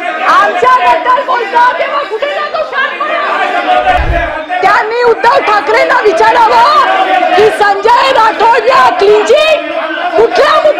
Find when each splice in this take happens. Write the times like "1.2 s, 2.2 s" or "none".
4.0 s